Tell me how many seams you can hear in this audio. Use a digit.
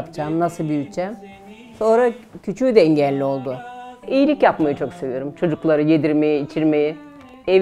1